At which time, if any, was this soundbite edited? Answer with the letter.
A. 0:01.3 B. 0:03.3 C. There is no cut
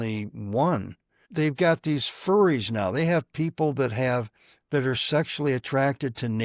A